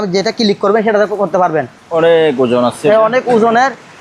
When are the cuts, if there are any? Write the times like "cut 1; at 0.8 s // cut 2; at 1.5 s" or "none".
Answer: cut 1; at 1.8 s